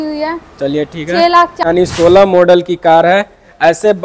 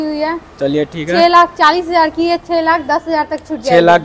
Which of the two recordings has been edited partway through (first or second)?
first